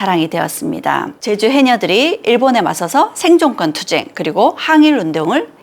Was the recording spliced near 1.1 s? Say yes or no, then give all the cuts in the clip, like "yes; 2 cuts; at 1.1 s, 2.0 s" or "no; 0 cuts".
yes; 1 cut; at 1.1 s